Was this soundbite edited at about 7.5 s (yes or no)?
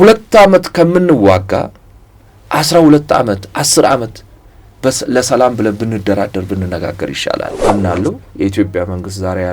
yes